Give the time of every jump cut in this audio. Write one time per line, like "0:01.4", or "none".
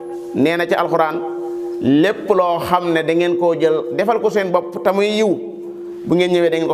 none